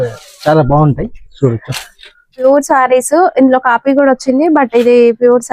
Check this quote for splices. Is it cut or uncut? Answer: cut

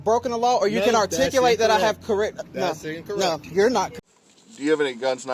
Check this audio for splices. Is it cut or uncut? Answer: cut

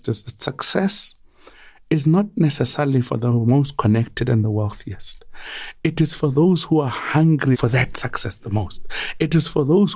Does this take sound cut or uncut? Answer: cut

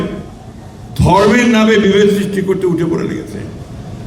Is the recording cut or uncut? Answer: uncut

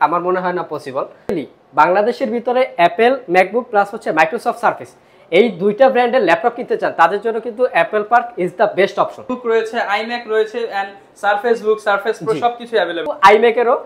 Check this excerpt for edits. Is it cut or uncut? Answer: cut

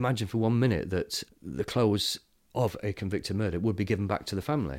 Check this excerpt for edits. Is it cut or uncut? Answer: cut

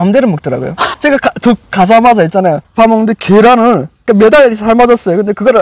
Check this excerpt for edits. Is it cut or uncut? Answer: cut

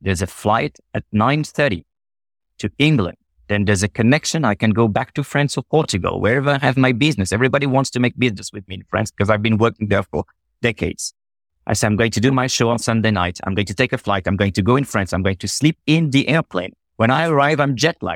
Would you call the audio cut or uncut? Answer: uncut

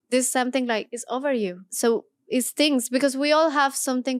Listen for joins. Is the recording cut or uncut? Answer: cut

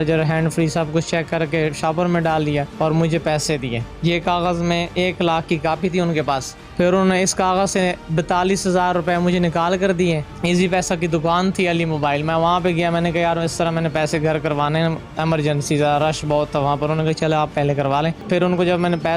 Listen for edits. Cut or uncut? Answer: cut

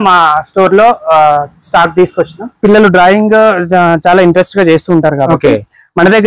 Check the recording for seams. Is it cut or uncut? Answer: cut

